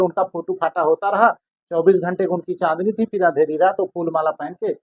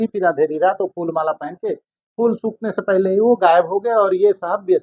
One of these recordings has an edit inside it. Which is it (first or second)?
first